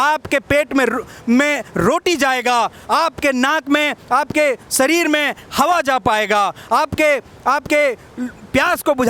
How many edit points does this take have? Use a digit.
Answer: 0